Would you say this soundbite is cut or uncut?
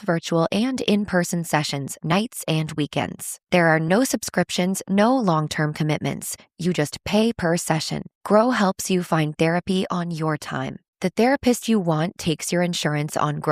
uncut